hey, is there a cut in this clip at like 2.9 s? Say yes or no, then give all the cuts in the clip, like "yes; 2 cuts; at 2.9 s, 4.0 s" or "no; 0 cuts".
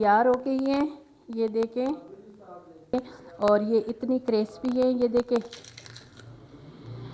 yes; 1 cut; at 2.9 s